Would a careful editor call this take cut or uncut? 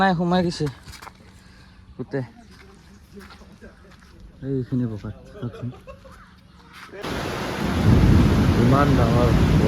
cut